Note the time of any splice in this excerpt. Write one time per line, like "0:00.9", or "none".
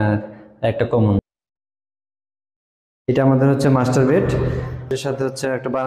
0:01.2
0:04.9

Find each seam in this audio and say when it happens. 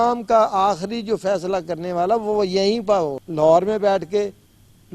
0:03.2

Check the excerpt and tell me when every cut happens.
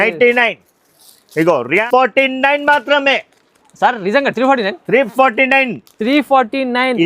0:01.8

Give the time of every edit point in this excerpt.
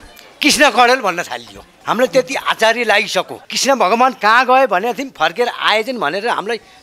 0:03.4

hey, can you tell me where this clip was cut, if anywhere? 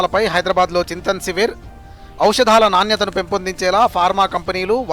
none

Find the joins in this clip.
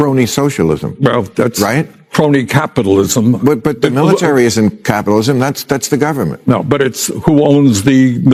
none

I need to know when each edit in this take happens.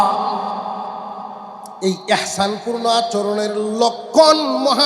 0:01.7

